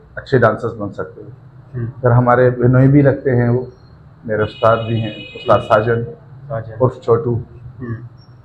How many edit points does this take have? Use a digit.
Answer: 0